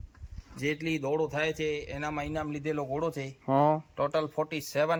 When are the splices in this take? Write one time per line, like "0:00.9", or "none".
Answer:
none